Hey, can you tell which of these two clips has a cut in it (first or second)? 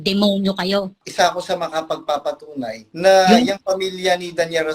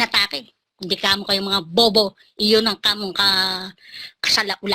first